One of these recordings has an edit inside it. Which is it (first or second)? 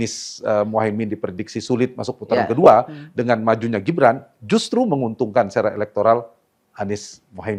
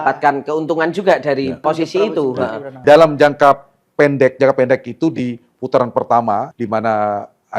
second